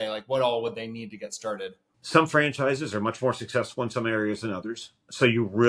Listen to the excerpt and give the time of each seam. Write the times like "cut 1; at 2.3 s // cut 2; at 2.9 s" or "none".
cut 1; at 1.9 s